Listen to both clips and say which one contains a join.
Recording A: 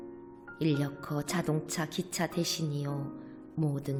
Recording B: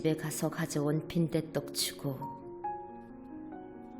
B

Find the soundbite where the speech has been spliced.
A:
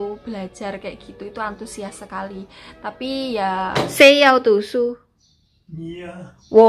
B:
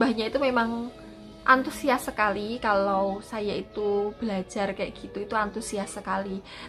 A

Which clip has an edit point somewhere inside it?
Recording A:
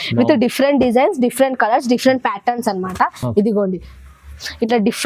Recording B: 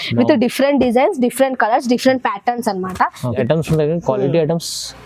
B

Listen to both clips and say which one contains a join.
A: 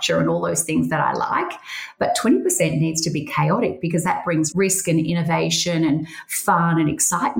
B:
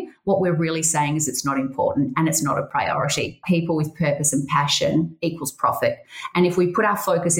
B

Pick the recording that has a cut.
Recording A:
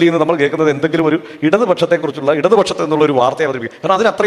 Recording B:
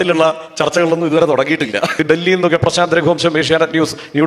B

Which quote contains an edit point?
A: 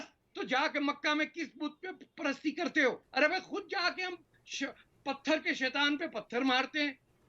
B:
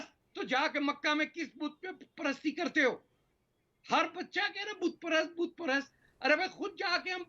A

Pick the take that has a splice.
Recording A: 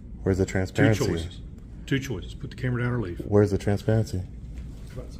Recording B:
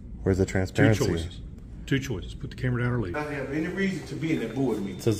B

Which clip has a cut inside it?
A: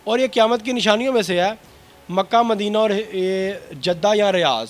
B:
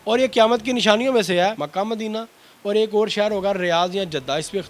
B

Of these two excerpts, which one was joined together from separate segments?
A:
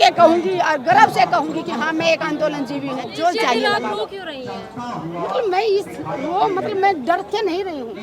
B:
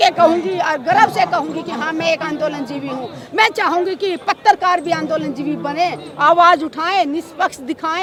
A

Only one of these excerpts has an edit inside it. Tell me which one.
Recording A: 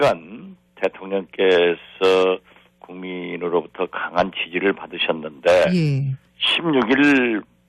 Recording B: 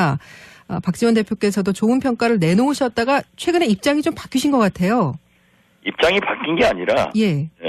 B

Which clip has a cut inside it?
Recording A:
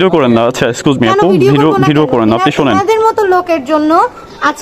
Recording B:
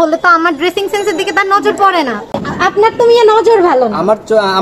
B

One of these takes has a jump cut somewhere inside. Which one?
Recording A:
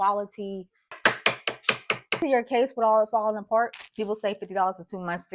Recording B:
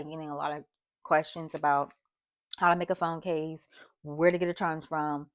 A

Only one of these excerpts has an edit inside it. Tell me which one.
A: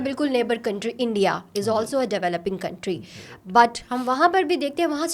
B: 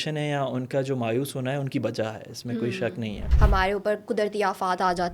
B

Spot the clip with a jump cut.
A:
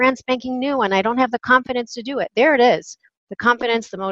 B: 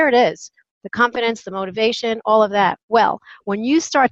B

